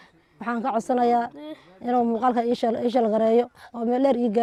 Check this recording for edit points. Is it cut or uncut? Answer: uncut